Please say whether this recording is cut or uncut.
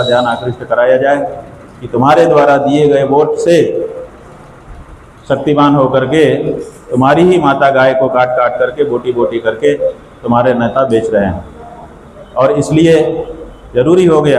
uncut